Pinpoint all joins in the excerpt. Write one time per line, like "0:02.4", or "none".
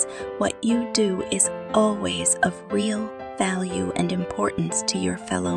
none